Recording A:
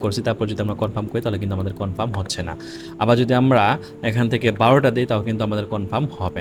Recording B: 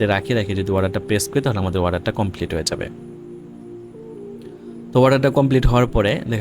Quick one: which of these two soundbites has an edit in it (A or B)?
B